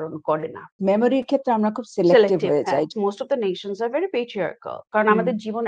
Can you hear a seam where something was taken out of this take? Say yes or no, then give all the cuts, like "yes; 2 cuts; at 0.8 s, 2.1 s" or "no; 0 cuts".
yes; 3 cuts; at 0.8 s, 2.9 s, 4.8 s